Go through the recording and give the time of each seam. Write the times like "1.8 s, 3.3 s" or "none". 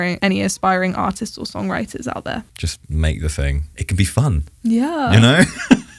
3.7 s